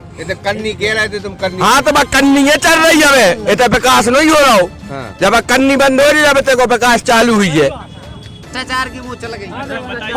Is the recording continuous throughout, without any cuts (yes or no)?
no